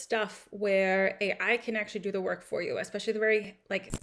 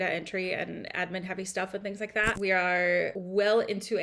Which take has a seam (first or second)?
second